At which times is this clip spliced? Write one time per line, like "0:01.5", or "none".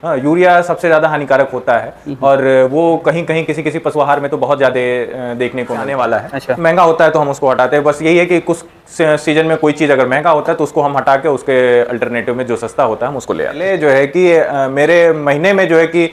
0:05.9
0:13.6